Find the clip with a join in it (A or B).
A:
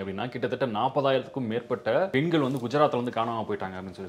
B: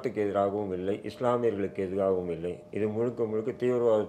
A